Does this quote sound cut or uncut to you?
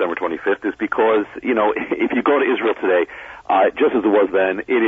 uncut